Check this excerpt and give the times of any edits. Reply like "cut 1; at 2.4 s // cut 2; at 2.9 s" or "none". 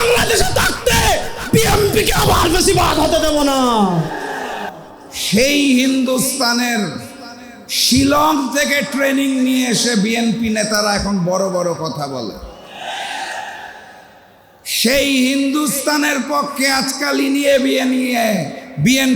cut 1; at 4.7 s